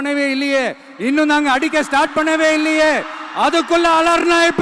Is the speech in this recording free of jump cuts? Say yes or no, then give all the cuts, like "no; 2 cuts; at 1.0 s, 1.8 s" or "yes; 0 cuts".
yes; 0 cuts